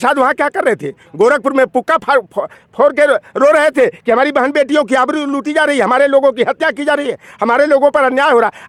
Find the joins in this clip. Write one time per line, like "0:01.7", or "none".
none